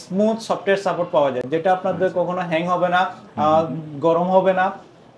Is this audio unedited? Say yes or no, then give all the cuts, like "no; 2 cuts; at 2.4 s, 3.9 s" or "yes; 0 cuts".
yes; 0 cuts